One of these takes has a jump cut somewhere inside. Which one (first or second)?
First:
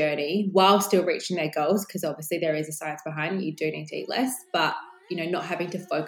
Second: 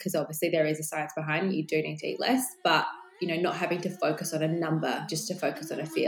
second